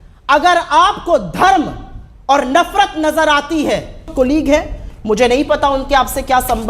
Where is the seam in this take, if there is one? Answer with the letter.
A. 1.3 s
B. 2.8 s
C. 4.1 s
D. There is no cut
C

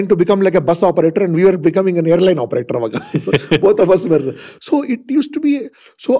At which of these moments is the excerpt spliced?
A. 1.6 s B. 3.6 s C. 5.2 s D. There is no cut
D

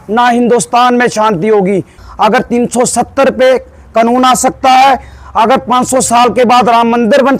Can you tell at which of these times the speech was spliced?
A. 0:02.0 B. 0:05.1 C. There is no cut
A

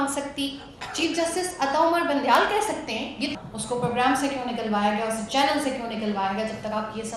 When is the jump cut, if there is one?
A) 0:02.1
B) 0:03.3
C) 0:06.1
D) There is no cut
B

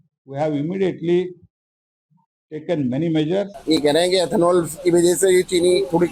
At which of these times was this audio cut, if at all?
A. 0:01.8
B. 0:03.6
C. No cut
B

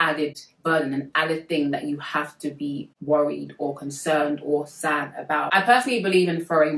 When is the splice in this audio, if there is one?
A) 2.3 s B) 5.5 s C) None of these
B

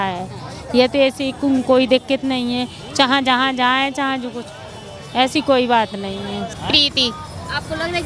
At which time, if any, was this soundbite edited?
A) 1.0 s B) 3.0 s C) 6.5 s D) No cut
C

